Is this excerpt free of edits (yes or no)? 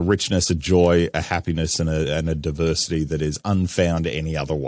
yes